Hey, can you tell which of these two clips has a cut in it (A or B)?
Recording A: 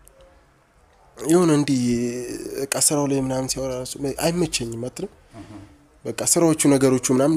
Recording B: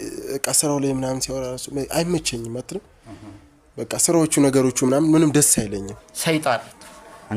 B